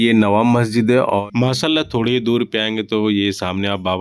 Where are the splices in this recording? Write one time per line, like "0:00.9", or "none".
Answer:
0:01.2

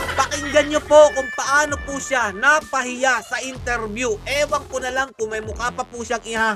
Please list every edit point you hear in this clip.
none

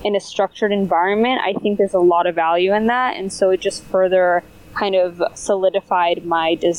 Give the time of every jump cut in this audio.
none

